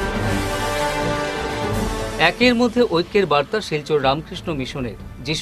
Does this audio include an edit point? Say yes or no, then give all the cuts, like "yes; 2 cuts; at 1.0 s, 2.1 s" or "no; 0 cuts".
yes; 1 cut; at 1.7 s